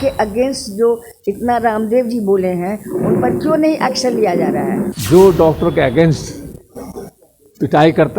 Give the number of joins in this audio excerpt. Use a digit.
1